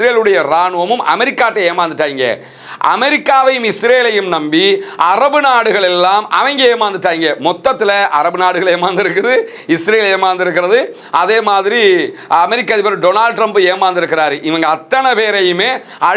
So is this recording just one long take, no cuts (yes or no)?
yes